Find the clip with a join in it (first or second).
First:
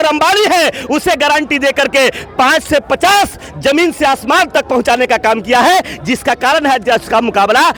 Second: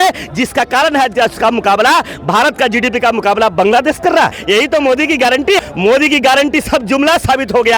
second